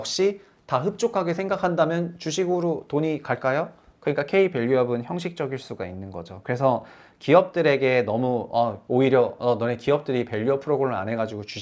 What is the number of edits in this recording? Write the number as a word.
one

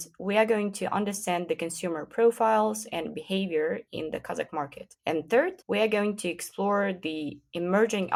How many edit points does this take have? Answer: zero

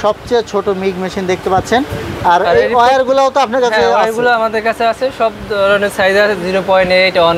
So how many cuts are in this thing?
zero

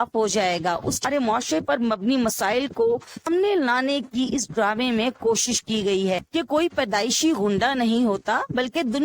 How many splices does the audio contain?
three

